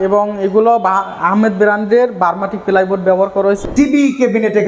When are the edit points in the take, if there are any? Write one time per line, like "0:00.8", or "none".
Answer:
0:03.6